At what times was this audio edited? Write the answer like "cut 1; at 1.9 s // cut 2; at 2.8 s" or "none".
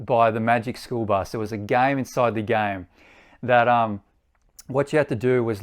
cut 1; at 1.3 s